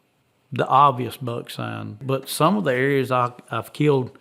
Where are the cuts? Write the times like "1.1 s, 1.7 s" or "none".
2.0 s